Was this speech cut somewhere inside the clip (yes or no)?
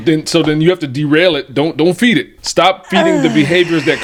no